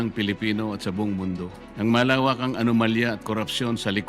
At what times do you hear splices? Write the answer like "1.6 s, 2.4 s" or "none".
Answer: 1.6 s